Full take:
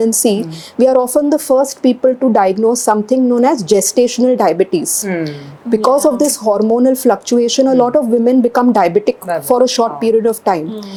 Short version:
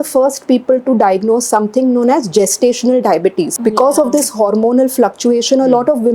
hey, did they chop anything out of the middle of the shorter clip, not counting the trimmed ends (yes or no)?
yes